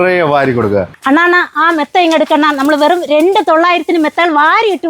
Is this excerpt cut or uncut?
cut